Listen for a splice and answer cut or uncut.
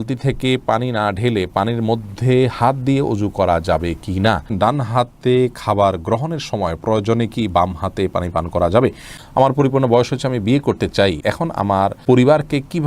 cut